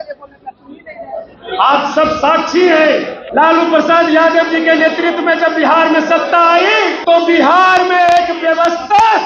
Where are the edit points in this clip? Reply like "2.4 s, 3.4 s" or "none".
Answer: 3.2 s, 7.0 s